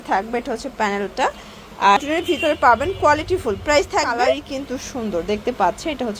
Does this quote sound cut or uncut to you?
cut